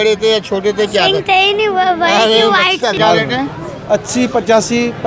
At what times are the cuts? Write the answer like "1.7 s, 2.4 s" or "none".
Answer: 3.0 s